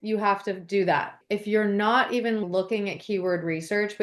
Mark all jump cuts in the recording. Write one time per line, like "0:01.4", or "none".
0:01.2